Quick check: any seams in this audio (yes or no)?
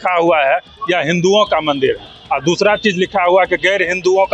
no